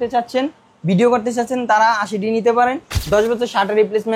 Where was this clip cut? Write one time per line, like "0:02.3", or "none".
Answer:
0:02.9